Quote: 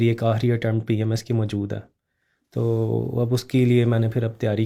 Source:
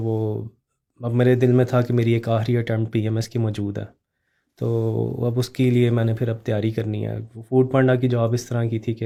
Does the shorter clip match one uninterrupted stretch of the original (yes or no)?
yes